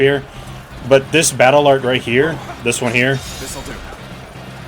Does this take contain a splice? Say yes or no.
yes